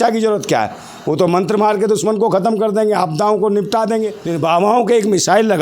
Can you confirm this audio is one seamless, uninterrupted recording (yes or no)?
no